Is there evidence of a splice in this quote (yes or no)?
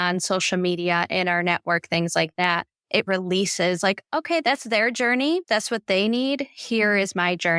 no